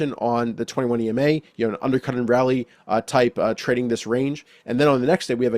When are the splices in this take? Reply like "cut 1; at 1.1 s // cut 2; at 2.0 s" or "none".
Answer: none